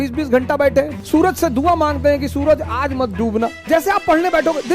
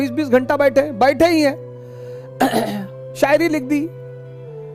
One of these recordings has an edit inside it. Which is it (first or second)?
first